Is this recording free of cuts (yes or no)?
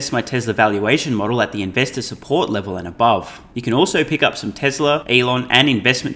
no